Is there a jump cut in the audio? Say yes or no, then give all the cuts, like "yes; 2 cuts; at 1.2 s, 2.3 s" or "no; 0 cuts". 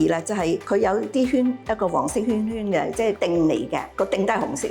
yes; 1 cut; at 3.2 s